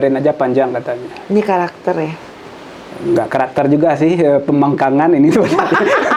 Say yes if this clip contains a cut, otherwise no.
no